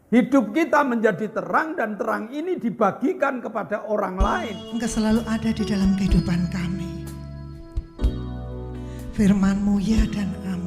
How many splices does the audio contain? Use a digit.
1